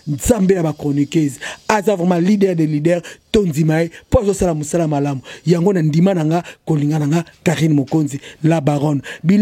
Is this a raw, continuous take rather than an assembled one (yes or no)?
yes